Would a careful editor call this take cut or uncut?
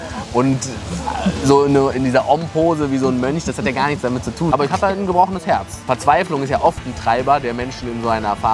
cut